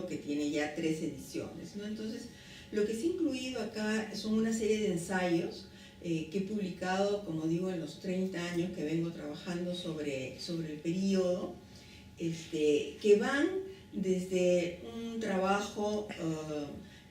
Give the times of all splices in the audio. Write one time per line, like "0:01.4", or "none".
0:14.2